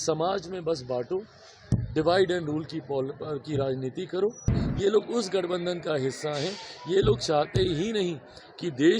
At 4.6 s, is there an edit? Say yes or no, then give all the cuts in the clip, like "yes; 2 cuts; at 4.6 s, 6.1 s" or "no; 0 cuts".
yes; 1 cut; at 4.6 s